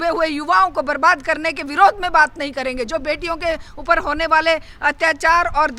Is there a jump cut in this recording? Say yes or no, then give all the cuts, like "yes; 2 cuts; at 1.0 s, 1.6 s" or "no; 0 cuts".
no; 0 cuts